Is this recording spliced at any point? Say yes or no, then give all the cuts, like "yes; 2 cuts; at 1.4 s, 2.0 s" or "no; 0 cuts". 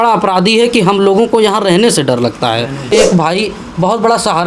yes; 1 cut; at 2.9 s